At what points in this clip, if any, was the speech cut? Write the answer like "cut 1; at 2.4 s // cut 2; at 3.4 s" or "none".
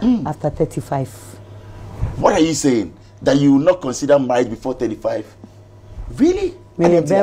none